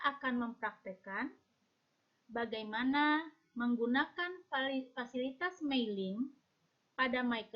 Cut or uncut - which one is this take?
uncut